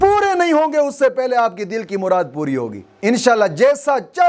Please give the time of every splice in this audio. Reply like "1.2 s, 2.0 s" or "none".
none